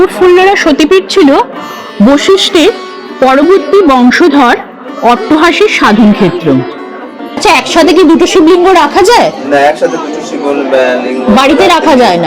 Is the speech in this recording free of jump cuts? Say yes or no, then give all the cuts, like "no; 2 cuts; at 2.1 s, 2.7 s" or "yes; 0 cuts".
no; 1 cut; at 7.4 s